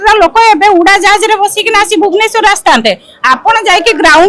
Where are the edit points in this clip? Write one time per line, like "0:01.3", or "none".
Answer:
none